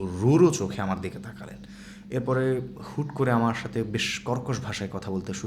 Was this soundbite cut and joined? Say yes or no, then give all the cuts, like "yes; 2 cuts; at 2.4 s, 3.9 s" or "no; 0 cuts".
no; 0 cuts